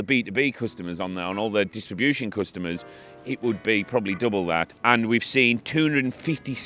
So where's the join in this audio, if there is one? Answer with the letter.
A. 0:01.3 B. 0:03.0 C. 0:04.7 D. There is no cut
C